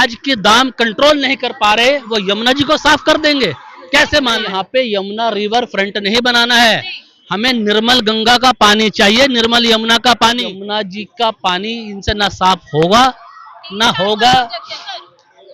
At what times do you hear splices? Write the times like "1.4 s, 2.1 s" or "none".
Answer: 4.5 s, 10.5 s